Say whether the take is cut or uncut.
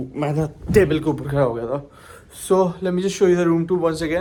uncut